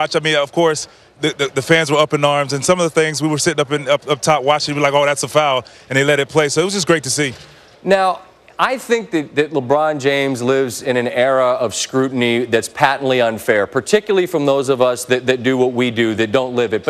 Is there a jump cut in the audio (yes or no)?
yes